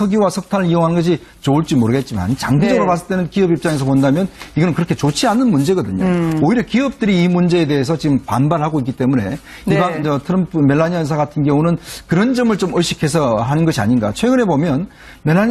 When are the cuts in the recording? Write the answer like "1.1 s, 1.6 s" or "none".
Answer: none